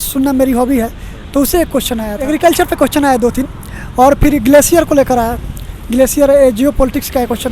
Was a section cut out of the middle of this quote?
yes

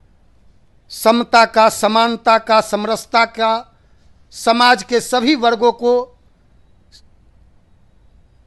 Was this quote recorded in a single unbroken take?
yes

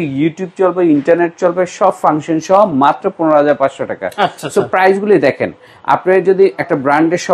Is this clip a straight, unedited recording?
yes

